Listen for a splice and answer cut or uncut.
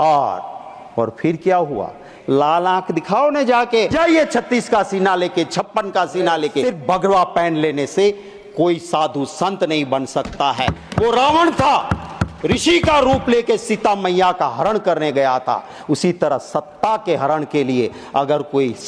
cut